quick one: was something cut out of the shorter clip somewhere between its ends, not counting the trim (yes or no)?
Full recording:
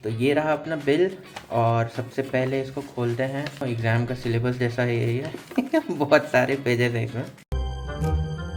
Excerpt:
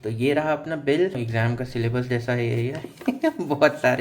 yes